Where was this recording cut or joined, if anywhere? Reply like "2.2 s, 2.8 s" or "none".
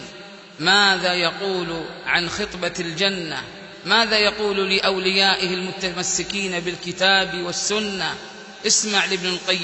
none

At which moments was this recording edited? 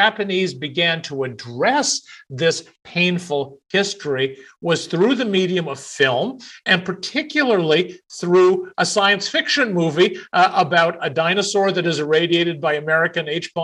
none

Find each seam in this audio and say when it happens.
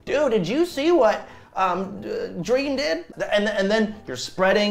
3.1 s

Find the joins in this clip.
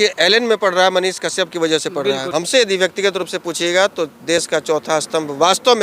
2.2 s

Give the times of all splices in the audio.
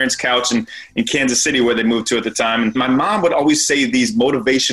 2.8 s

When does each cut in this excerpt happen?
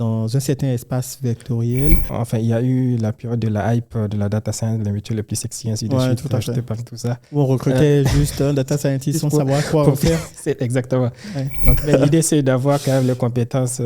2.1 s, 11.8 s

